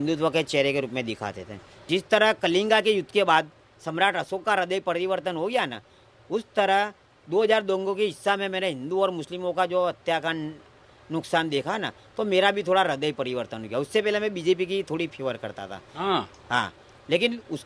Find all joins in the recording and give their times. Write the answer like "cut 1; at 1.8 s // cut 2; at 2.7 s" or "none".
cut 1; at 1.9 s

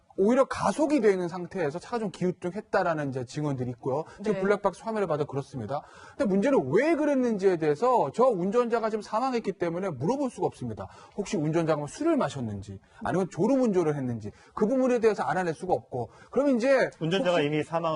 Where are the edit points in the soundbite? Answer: none

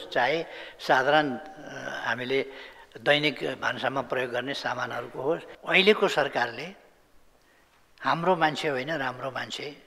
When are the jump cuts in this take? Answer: cut 1; at 5.5 s

